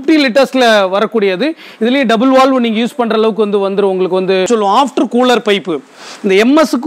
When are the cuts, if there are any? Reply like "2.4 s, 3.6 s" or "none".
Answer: 4.5 s